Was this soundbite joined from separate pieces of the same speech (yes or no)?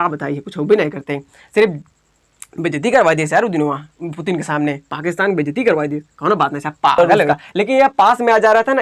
yes